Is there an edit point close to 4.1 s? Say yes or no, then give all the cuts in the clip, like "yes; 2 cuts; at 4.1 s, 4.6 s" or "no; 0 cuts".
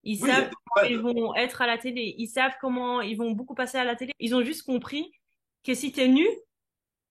yes; 1 cut; at 4.1 s